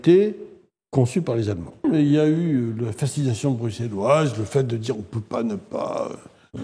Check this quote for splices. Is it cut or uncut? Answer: cut